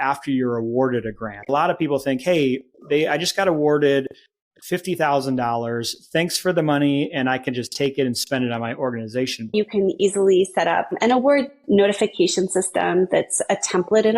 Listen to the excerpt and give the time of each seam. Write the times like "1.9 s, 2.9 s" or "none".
1.5 s, 9.5 s

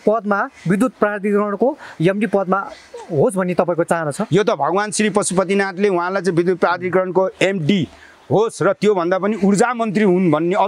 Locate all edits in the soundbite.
none

